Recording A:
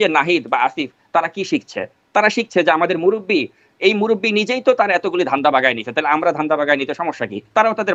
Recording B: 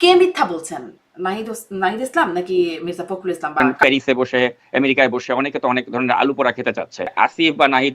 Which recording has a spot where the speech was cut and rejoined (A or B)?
B